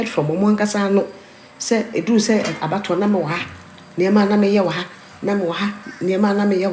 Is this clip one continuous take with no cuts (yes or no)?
yes